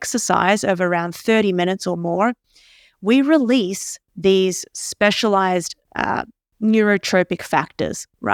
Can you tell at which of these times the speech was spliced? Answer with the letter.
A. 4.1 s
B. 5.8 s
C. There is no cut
C